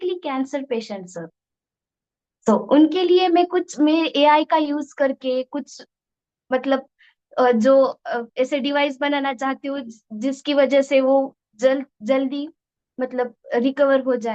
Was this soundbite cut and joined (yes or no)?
no